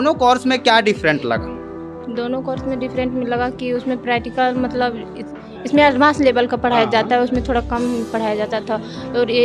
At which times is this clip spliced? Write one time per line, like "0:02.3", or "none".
none